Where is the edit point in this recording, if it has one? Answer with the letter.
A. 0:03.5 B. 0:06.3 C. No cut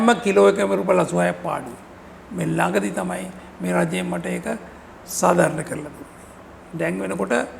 C